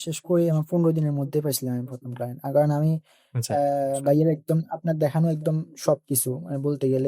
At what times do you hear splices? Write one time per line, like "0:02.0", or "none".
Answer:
none